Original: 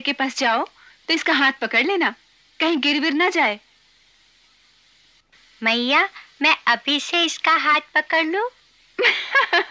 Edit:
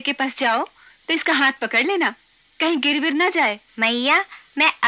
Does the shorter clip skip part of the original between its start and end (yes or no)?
yes